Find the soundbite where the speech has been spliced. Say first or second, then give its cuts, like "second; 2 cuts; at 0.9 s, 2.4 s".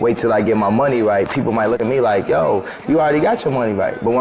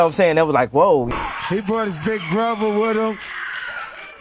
second; 1 cut; at 1.1 s